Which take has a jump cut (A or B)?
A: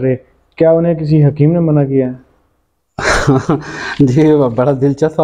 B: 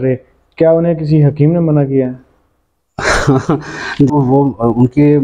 B